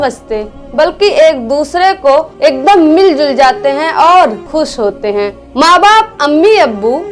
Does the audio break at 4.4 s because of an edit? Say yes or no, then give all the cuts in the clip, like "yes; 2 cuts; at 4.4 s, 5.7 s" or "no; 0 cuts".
yes; 1 cut; at 4.4 s